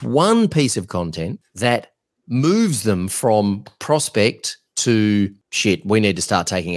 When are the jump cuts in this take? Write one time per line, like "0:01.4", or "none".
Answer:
0:01.4
0:05.5